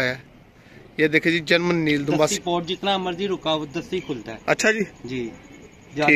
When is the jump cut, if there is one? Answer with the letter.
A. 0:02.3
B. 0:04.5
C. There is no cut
A